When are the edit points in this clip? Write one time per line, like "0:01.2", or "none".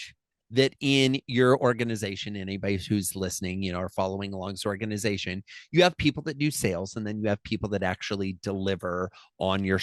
none